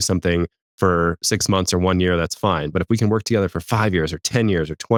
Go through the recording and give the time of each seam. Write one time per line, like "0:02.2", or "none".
none